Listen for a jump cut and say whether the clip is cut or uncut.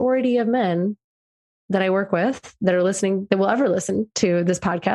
uncut